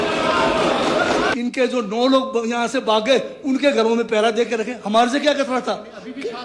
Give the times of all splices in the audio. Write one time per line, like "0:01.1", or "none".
0:01.3